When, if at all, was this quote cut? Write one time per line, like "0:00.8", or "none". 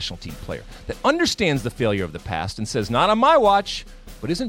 none